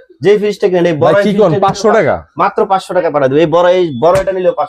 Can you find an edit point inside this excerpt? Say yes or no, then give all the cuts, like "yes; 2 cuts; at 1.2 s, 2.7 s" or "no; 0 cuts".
no; 0 cuts